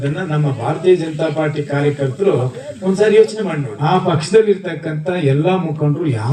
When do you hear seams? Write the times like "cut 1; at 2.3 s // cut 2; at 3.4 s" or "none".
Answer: cut 1; at 3.7 s